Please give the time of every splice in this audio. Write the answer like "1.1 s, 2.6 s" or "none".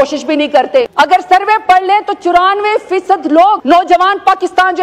0.9 s, 3.6 s